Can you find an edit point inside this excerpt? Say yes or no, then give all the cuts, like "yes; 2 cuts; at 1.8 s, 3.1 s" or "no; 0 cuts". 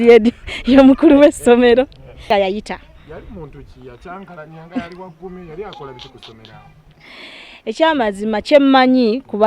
yes; 1 cut; at 2.3 s